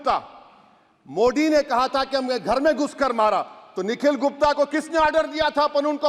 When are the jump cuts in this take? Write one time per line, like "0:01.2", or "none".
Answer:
none

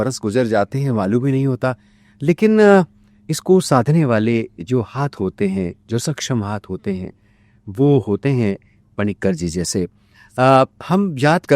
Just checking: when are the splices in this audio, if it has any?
none

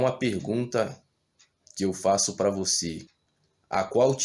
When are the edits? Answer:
0:03.0

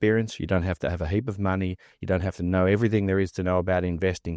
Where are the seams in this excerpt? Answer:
none

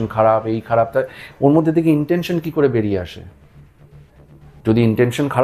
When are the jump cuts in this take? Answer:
none

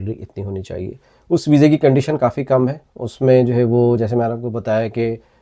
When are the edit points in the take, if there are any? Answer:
0:01.1

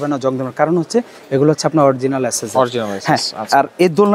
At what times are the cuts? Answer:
none

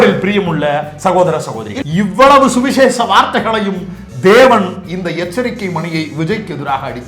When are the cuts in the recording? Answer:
0:01.8

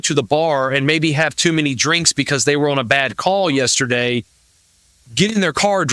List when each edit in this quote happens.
none

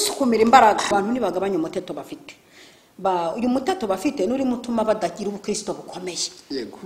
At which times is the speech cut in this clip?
0:00.9

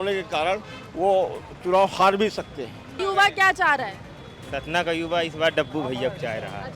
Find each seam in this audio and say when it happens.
0:03.0

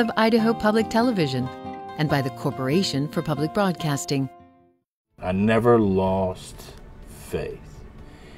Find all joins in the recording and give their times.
0:05.1

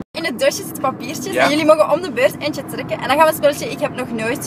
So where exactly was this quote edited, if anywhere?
0:01.0

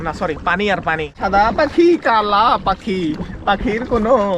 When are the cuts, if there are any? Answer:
0:01.2

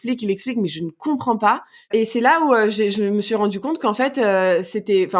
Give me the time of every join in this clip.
0:01.9

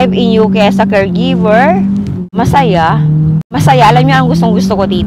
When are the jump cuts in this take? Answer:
0:02.3
0:03.6

